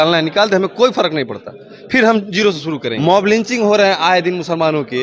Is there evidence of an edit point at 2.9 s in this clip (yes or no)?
yes